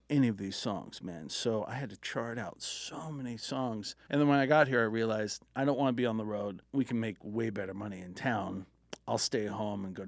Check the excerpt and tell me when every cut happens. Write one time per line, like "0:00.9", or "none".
0:03.9
0:06.6

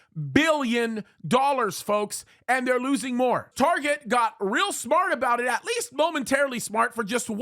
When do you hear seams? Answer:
0:03.5

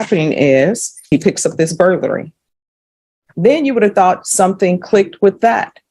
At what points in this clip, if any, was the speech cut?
0:01.1

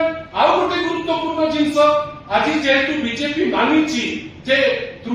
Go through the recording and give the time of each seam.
none

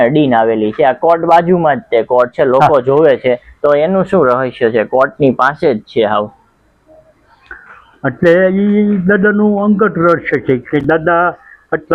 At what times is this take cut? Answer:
none

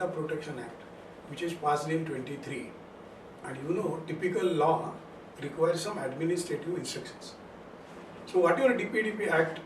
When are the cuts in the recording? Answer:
0:07.8

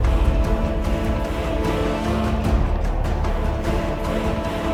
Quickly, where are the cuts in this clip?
none

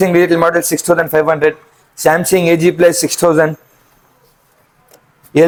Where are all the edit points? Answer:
none

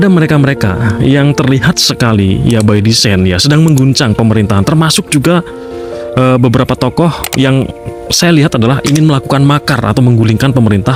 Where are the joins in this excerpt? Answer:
none

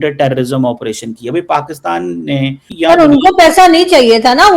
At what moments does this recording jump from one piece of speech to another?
0:02.6

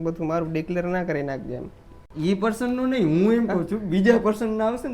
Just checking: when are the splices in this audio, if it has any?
none

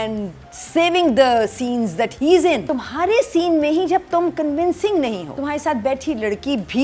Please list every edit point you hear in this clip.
0:02.6
0:05.3

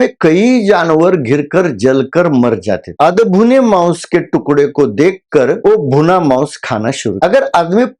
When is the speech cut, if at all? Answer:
0:02.9
0:05.6
0:07.2

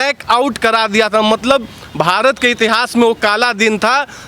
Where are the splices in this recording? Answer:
none

